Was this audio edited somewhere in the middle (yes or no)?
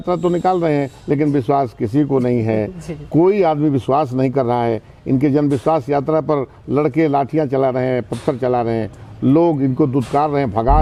no